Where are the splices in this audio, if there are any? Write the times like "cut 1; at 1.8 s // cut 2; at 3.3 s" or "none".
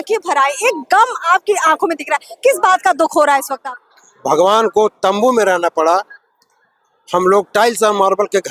cut 1; at 3.5 s